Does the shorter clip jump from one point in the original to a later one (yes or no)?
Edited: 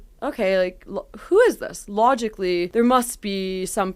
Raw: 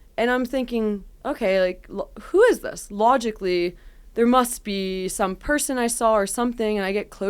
yes